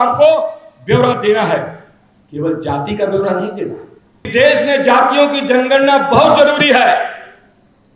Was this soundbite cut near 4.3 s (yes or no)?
yes